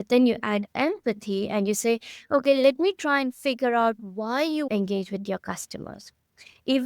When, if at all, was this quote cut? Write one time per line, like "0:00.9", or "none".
0:04.7